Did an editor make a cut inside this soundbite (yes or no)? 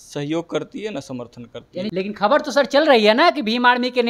yes